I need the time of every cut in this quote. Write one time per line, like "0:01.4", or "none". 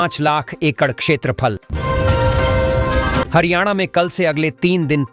0:01.7
0:03.3